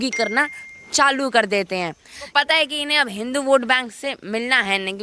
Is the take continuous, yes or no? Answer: no